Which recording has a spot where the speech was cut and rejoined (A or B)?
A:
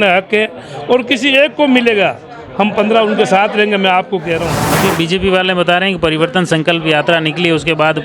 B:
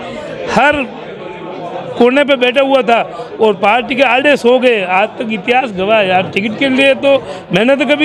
A